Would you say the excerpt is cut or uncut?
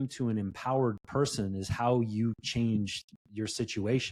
uncut